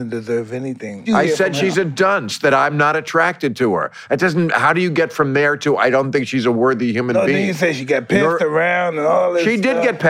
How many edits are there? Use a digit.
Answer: 1